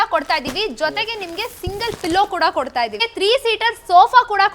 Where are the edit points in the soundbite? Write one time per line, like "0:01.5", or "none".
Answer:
0:03.0